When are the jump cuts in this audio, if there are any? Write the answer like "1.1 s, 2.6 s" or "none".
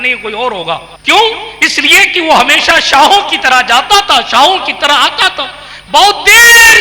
0.9 s

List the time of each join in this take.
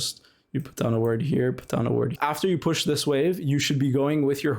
2.1 s

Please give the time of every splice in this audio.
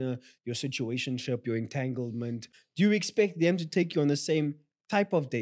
2.6 s

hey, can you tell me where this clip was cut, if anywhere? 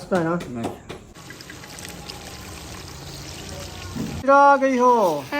1.1 s, 4.2 s

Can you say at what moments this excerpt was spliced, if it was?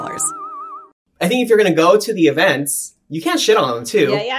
1.0 s

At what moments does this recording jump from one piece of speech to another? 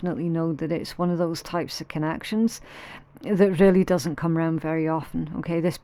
none

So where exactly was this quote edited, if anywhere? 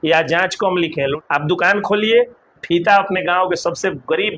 1.2 s

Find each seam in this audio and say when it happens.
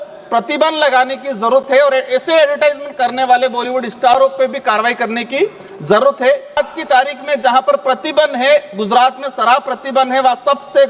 6.6 s

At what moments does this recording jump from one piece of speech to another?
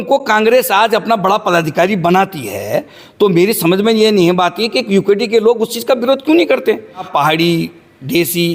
7.1 s

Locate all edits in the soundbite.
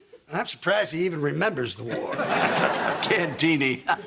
1.8 s

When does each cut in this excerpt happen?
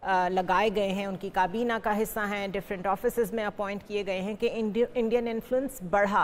none

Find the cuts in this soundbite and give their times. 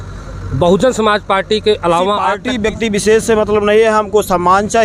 2.4 s

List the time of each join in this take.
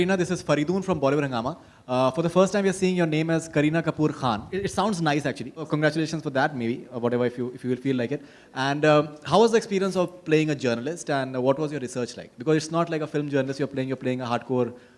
4.6 s

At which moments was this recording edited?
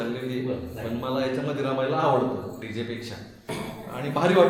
3.5 s

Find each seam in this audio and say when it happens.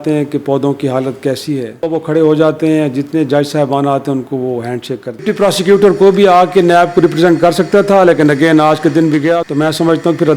1.9 s, 5.2 s, 9.4 s

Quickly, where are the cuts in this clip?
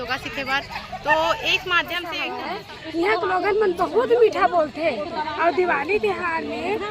2.2 s

